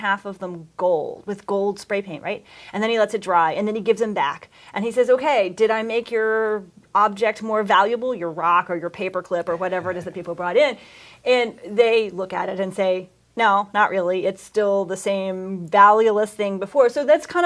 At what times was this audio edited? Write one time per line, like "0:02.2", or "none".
none